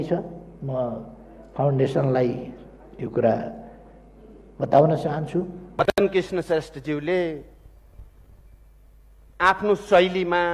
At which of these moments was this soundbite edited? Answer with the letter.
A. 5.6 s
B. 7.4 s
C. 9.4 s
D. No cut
A